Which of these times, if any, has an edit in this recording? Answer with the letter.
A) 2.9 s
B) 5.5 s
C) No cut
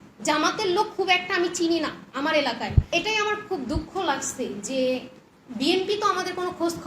A